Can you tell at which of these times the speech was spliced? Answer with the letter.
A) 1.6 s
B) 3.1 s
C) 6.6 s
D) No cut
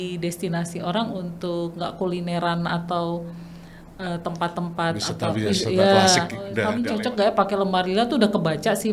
C